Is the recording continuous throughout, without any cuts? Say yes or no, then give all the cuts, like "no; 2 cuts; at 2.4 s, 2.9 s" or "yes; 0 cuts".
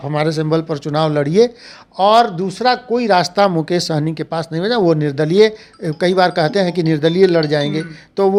yes; 0 cuts